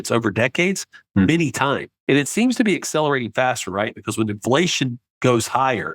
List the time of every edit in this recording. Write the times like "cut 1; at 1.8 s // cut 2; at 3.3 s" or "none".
cut 1; at 1.9 s

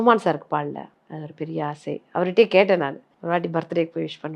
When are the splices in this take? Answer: cut 1; at 1.0 s // cut 2; at 3.1 s

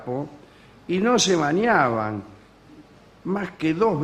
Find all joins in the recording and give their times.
cut 1; at 1.8 s

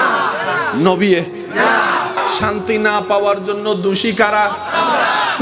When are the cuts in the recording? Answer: cut 1; at 2.2 s

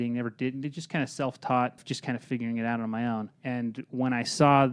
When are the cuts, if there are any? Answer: cut 1; at 1.9 s // cut 2; at 3.3 s

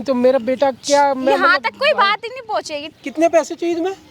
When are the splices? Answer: cut 1; at 2.8 s

